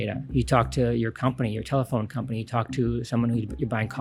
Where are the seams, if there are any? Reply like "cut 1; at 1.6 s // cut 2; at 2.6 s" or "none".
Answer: none